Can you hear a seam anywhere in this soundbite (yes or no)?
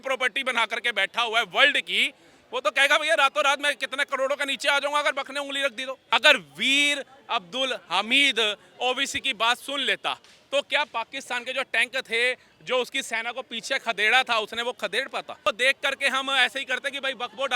yes